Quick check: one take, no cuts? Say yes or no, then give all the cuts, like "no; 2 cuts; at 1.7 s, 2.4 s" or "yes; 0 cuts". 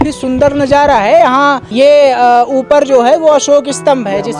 no; 1 cut; at 1.6 s